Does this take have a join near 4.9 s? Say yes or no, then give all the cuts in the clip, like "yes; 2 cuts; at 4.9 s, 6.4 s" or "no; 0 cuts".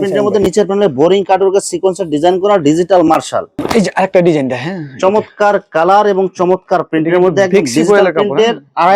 no; 1 cut; at 3.6 s